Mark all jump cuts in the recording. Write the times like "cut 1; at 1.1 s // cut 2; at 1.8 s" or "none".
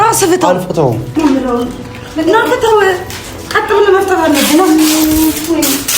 cut 1; at 1.1 s